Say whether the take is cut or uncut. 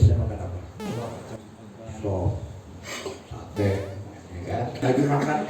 cut